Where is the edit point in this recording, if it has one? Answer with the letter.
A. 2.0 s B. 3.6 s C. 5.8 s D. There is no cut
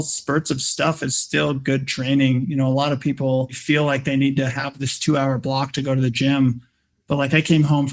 B